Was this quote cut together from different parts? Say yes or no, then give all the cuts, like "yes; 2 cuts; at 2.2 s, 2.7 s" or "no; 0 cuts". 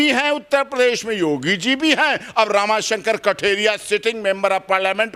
no; 0 cuts